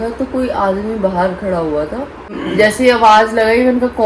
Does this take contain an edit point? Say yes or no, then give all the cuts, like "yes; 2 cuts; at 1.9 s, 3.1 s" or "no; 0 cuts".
yes; 1 cut; at 2.4 s